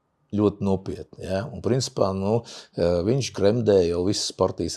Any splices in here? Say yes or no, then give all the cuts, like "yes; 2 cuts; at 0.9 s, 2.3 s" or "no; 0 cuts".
no; 0 cuts